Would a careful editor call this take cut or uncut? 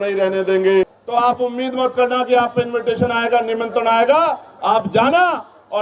cut